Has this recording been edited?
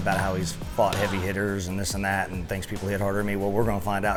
no; 0 cuts

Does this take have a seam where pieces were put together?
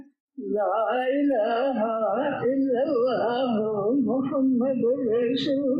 no; 0 cuts

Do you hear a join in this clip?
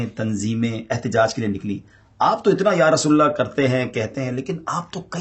no; 0 cuts

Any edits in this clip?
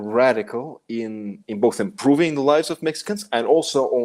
no; 0 cuts

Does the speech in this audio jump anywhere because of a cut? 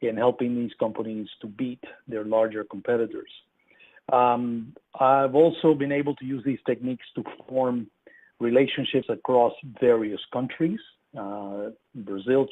yes; 1 cut; at 6.5 s

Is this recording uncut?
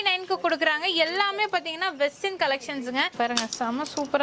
no; 1 cut; at 3.1 s

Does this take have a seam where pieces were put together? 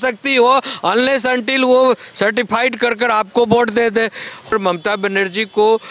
yes; 1 cut; at 4.5 s

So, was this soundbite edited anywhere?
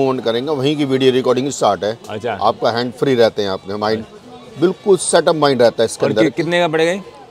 no; 0 cuts

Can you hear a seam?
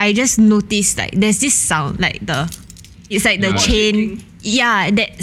yes; 1 cut; at 3.1 s

